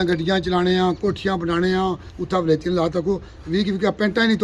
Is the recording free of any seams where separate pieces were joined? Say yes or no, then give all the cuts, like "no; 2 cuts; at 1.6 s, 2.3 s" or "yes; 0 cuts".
no; 1 cut; at 2.1 s